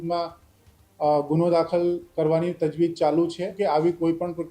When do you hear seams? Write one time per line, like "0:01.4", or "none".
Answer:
0:03.5